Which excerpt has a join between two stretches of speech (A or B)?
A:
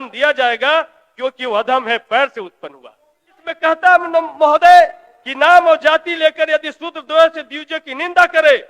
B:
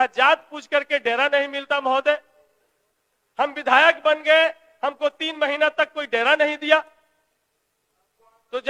A